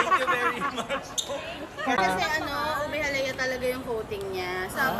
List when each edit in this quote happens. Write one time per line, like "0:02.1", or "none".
0:02.0